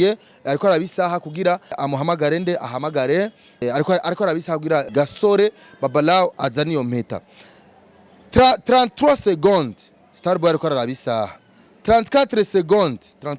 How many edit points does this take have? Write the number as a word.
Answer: three